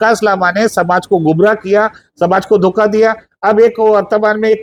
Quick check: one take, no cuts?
yes; 0 cuts

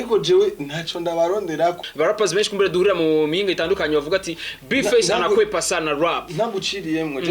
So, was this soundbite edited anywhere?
yes; 1 cut; at 1.9 s

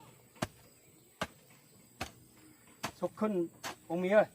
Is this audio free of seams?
yes; 0 cuts

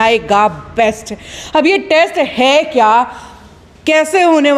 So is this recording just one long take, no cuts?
yes; 0 cuts

